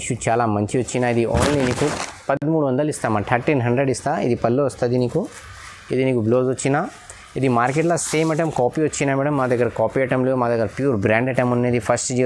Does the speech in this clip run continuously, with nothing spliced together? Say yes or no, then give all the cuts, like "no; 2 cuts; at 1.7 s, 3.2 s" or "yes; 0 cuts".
yes; 0 cuts